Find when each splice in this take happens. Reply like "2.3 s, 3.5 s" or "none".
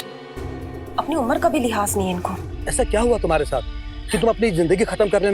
2.6 s